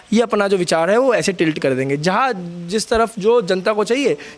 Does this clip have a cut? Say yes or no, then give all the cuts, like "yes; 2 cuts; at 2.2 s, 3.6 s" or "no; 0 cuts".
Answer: no; 0 cuts